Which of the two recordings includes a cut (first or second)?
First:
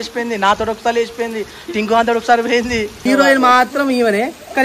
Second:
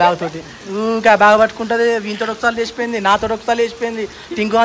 first